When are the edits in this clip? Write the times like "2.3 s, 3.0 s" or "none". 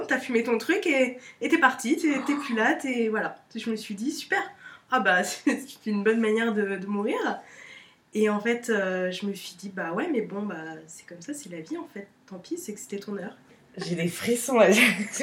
13.4 s